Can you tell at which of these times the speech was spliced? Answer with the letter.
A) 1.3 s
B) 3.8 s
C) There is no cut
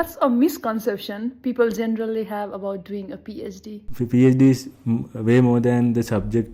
B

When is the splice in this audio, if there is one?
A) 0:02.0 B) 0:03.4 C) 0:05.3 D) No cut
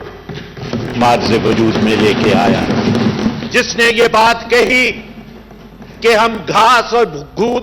B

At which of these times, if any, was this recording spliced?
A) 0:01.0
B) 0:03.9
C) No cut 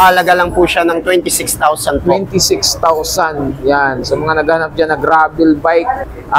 C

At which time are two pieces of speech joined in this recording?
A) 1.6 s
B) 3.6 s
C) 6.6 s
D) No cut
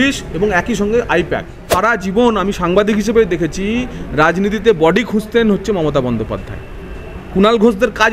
A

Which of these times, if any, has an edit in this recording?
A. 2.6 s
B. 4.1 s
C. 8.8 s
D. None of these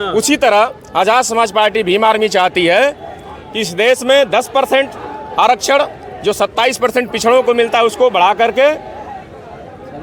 D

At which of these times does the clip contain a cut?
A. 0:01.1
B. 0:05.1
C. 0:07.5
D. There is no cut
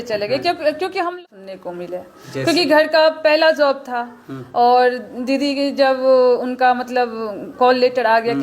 A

